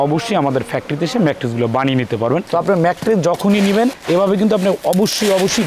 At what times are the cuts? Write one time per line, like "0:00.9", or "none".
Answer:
0:02.5